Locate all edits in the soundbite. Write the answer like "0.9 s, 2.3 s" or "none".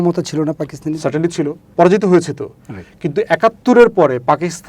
1.6 s